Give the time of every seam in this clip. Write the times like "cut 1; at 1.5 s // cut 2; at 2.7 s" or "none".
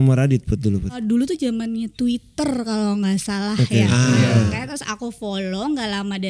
cut 1; at 0.9 s // cut 2; at 4.3 s